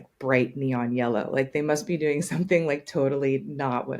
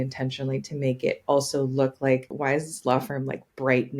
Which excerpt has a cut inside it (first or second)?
second